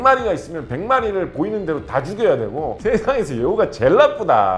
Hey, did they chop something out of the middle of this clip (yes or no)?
yes